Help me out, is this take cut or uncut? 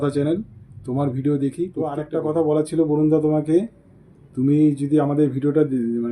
cut